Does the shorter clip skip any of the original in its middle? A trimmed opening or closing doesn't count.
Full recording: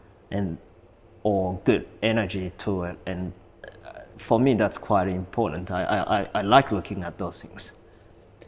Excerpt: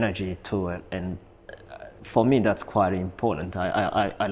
no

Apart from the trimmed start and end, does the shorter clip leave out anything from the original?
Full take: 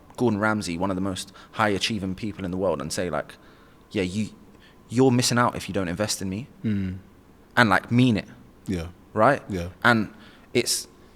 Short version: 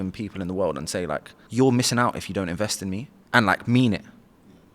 yes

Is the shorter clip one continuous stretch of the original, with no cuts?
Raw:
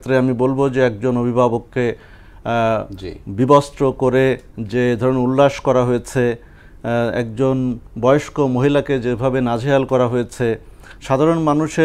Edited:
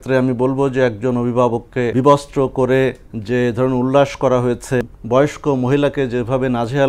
no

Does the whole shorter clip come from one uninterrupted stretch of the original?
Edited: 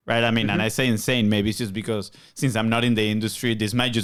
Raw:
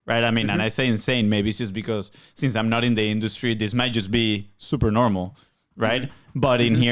yes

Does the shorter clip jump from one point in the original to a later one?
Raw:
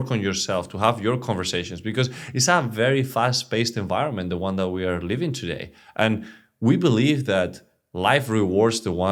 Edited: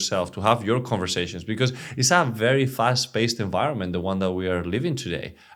no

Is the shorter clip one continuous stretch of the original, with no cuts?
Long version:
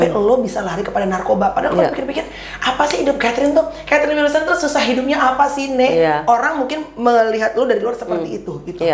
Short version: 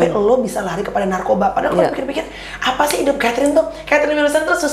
yes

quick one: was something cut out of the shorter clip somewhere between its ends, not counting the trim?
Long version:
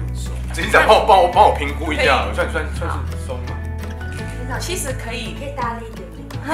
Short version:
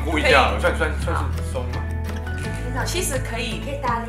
no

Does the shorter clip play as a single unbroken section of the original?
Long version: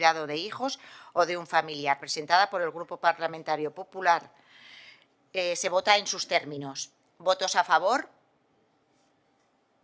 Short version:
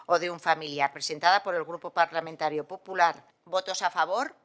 no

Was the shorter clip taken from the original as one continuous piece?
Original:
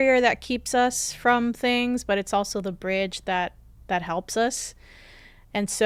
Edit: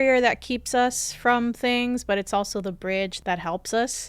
no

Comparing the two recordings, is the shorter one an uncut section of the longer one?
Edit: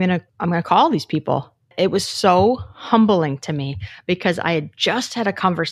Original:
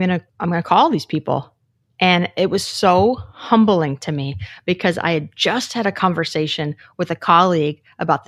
no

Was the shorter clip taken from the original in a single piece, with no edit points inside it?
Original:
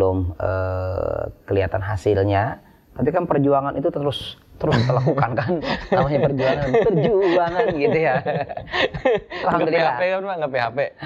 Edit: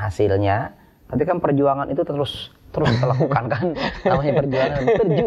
yes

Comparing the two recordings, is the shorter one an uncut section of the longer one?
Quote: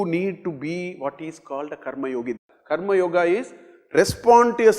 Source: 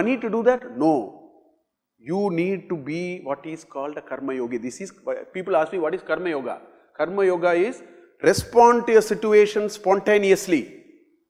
no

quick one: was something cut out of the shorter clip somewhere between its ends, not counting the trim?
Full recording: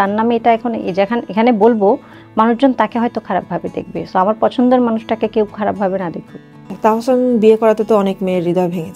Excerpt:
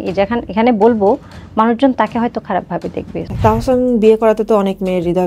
yes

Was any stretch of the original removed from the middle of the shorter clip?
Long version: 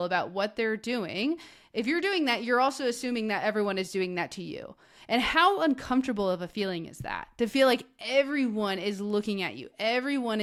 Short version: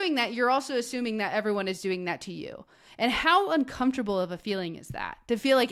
no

